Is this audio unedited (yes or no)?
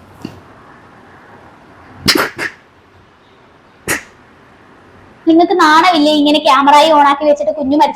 no